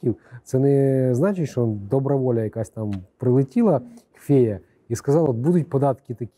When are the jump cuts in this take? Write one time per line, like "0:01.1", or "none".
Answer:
none